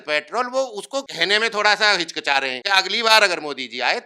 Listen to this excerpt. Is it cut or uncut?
cut